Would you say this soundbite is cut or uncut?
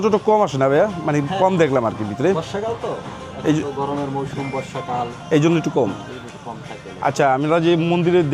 uncut